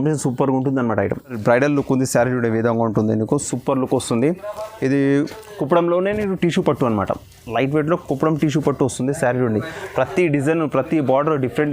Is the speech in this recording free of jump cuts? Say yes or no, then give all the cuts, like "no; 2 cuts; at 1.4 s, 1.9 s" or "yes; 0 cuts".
no; 1 cut; at 1.4 s